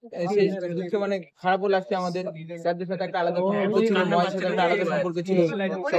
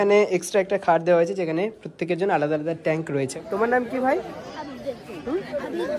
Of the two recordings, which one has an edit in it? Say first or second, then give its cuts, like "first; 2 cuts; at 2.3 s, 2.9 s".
second; 1 cut; at 3.4 s